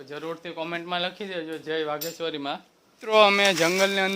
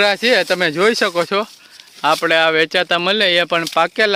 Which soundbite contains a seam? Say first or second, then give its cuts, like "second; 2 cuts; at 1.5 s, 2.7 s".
first; 1 cut; at 3.1 s